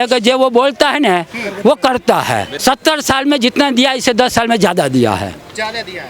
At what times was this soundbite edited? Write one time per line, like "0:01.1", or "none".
0:02.5